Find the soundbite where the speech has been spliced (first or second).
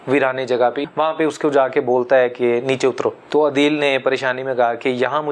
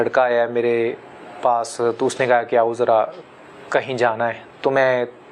first